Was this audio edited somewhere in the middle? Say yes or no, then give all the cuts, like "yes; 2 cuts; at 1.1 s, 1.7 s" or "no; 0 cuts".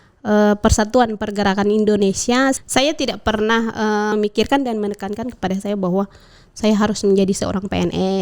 yes; 2 cuts; at 2.6 s, 4.1 s